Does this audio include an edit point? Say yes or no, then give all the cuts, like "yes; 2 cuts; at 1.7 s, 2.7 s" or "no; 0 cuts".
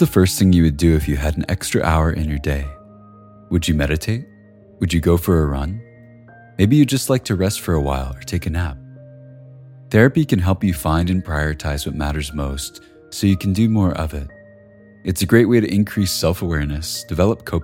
no; 0 cuts